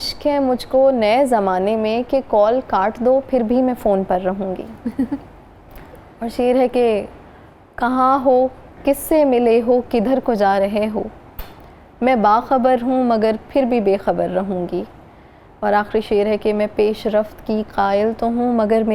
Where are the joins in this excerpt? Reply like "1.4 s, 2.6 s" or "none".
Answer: none